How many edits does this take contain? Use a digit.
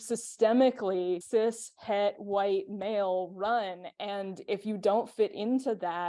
1